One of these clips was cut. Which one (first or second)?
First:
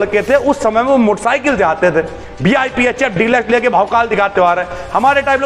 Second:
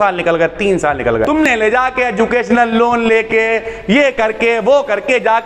second